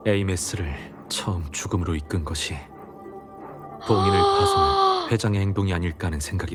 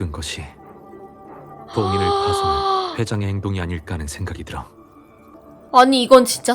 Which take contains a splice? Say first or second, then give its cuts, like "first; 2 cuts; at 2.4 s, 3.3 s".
second; 1 cut; at 5.3 s